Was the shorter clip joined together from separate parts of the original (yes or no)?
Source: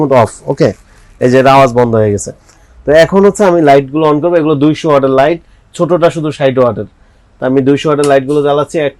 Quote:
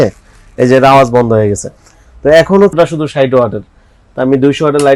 yes